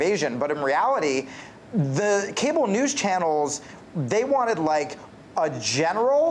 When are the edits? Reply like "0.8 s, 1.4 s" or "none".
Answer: none

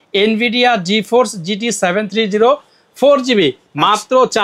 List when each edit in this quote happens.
none

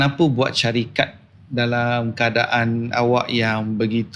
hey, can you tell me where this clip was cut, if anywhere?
none

